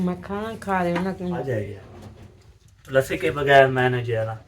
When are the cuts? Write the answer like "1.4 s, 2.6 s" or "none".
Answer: 1.4 s